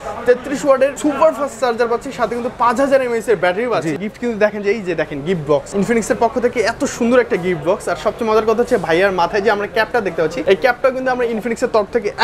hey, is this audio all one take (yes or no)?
no